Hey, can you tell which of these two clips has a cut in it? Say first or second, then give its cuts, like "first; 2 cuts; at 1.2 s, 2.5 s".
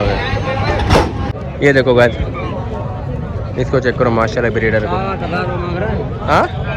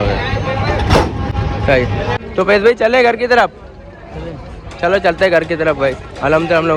first; 1 cut; at 1.3 s